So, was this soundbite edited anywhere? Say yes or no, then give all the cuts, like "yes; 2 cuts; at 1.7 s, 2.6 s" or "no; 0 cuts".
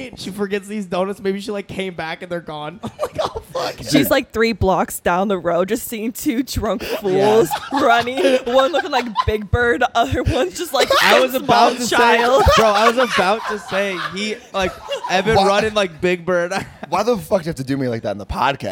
no; 0 cuts